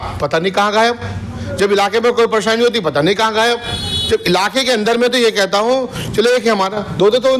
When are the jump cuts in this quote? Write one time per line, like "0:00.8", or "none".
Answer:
none

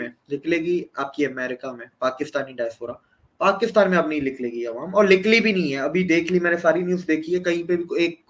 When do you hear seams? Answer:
none

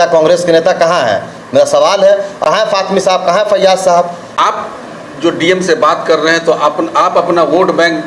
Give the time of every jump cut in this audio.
0:02.3
0:04.4

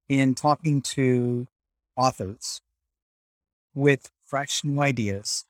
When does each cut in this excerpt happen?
none

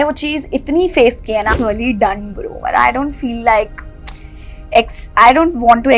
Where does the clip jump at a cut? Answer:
0:01.5

